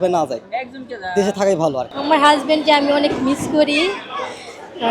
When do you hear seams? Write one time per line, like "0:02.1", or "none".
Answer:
0:01.9